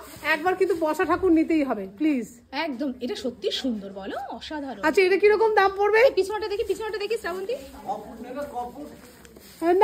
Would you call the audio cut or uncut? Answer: uncut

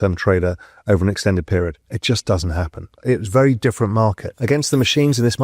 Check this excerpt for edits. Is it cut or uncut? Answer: cut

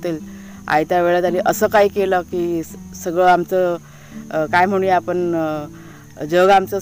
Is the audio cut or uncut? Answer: uncut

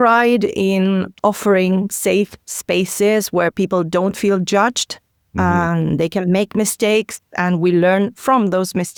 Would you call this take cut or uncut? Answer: uncut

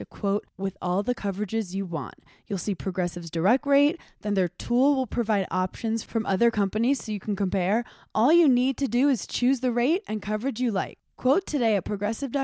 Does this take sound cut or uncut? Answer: uncut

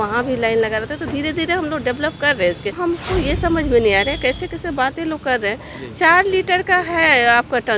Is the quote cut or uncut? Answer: cut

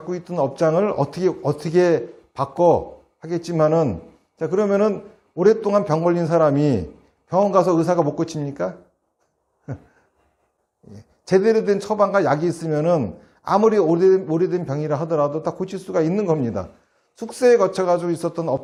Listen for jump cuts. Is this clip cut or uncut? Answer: uncut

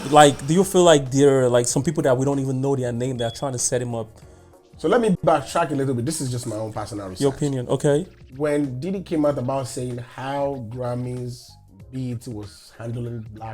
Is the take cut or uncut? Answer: uncut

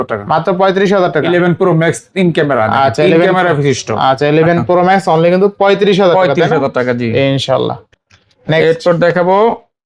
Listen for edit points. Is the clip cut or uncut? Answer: uncut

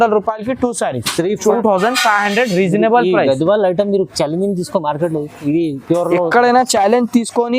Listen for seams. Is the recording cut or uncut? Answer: cut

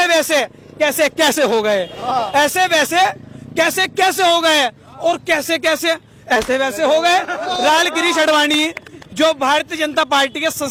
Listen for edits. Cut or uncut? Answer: uncut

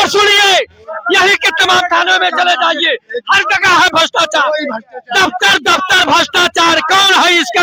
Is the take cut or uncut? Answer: uncut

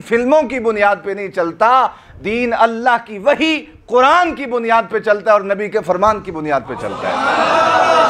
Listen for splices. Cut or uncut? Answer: uncut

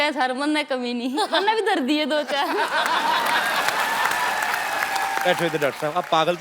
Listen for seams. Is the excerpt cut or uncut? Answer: cut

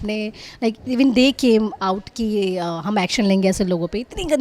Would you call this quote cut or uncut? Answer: uncut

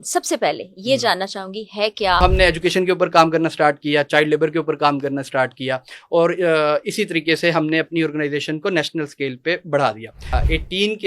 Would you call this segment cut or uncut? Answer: cut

